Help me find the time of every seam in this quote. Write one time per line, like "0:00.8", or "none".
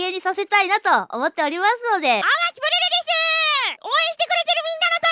0:02.2
0:03.8